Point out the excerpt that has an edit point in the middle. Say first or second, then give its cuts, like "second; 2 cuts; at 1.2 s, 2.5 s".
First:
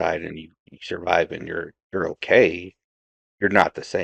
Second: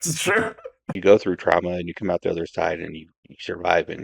second; 1 cut; at 0.9 s